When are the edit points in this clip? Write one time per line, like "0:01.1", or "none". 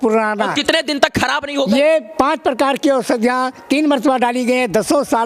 none